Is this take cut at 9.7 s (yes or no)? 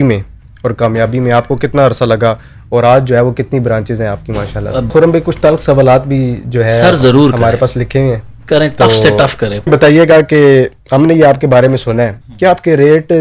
yes